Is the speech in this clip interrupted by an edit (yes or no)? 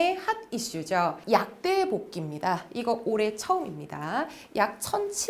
yes